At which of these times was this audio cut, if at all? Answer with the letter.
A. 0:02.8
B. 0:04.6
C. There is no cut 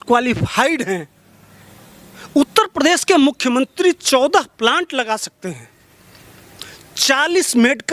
C